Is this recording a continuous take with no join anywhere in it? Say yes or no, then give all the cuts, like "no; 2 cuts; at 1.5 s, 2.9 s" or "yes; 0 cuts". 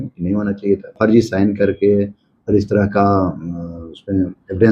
no; 1 cut; at 0.9 s